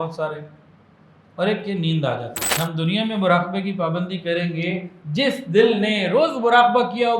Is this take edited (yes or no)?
yes